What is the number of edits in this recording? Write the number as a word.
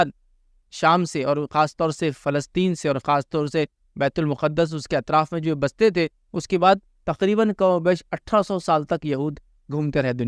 zero